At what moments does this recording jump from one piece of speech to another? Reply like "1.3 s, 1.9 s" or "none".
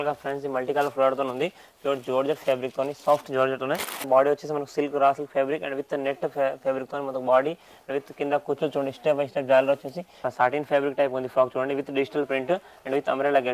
4.0 s, 10.3 s